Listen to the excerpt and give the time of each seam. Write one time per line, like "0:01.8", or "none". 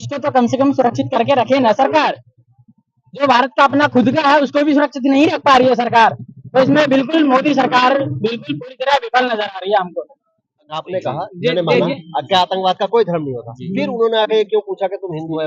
0:10.8